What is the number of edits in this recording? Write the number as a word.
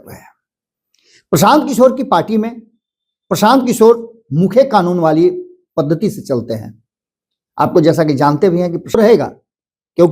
one